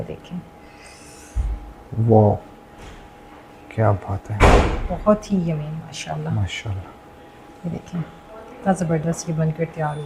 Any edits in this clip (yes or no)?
no